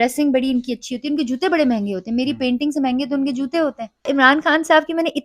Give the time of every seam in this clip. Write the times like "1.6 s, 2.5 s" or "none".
4.1 s